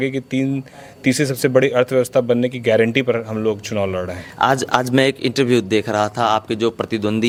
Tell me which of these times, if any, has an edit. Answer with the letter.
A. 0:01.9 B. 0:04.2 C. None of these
C